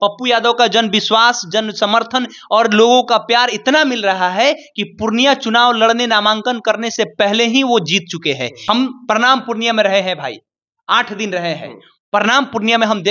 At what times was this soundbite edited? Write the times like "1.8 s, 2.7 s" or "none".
8.5 s